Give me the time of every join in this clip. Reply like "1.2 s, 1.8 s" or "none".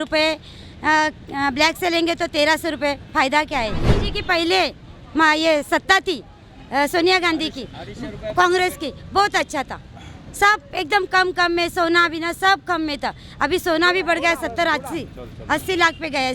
3.9 s